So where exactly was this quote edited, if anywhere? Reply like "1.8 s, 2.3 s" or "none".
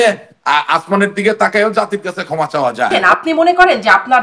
2.9 s